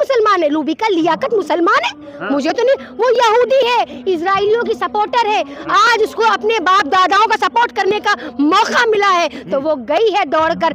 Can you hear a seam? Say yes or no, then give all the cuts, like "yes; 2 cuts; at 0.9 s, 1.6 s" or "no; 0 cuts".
no; 0 cuts